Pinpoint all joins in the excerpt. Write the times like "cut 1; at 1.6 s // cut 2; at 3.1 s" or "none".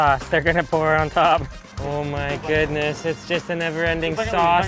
cut 1; at 1.7 s

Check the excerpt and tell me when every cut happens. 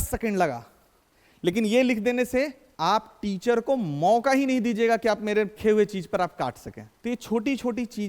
none

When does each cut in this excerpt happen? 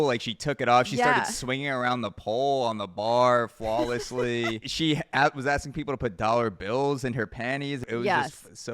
cut 1; at 4.7 s // cut 2; at 7.8 s

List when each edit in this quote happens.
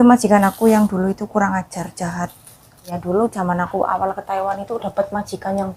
cut 1; at 3.0 s

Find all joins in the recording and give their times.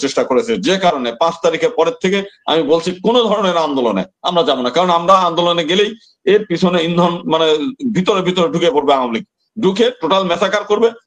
none

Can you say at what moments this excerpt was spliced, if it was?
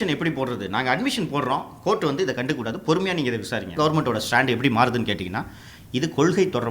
cut 1; at 3.7 s

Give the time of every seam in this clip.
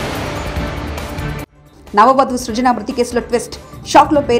none

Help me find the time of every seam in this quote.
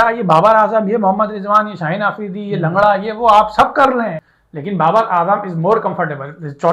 cut 1; at 4.2 s

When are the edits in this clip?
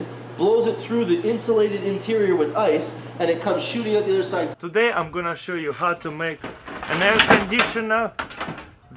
none

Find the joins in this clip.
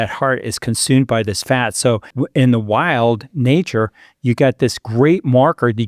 cut 1; at 2.1 s

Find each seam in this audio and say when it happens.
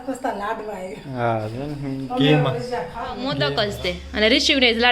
cut 1; at 3.3 s

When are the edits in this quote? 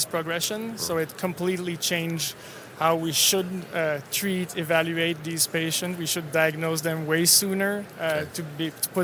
none

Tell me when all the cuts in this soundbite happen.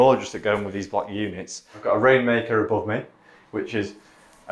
cut 1; at 1.8 s

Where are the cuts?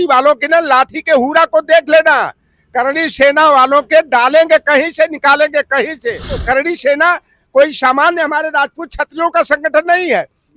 cut 1; at 6.4 s

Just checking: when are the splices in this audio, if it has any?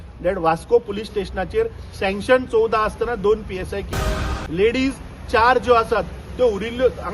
cut 1; at 3.9 s

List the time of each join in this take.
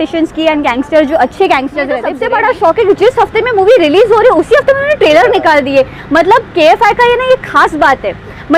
cut 1; at 2.1 s

